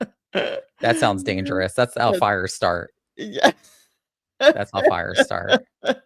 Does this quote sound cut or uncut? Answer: uncut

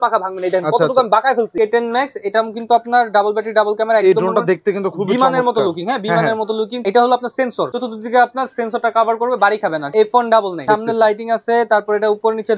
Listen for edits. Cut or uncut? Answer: cut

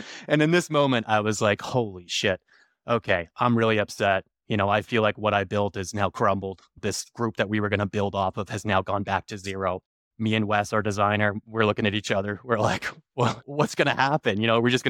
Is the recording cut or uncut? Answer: uncut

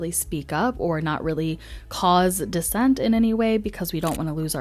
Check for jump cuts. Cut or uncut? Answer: uncut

